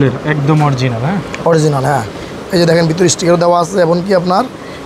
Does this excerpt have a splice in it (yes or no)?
no